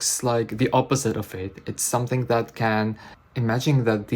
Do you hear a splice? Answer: yes; 1 cut; at 3.1 s

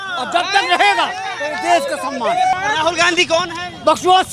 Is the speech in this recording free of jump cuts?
no; 1 cut; at 2.5 s

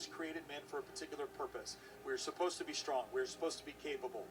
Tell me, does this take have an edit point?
no; 0 cuts

